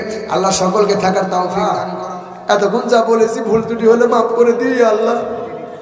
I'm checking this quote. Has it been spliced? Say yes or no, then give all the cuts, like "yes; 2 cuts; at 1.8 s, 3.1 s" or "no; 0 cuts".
yes; 1 cut; at 1.9 s